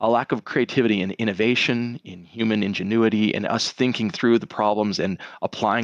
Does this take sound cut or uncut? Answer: uncut